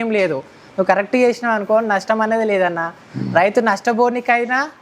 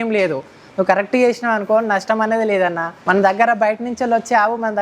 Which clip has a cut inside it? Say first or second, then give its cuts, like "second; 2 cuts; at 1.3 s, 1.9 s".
second; 1 cut; at 3.0 s